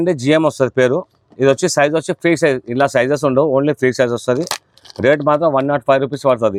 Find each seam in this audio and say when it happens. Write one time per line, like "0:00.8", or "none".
none